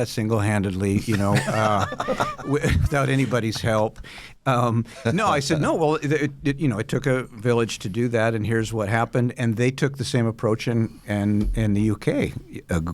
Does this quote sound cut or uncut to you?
uncut